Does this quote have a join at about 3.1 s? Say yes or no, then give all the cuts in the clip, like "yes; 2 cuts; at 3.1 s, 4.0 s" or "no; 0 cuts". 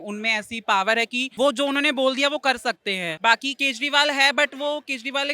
yes; 2 cuts; at 1.2 s, 3.1 s